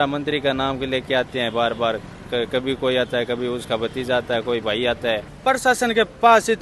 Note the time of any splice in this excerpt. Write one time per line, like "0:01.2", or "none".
0:05.3